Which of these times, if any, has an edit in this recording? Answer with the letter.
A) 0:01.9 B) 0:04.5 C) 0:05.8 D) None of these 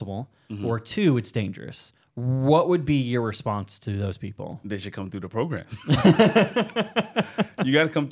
D